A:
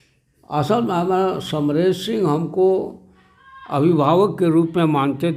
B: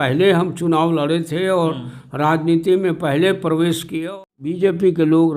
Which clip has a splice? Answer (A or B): B